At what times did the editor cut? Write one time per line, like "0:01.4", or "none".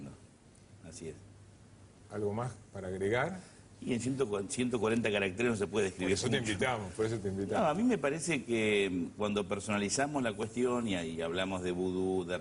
none